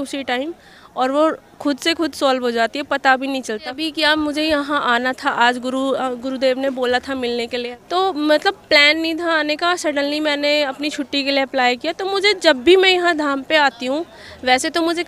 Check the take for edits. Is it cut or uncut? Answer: cut